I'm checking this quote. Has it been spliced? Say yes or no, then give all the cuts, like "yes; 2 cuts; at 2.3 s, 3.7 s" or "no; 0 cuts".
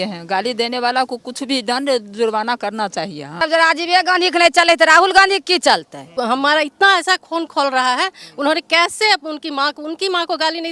yes; 2 cuts; at 3.4 s, 6.1 s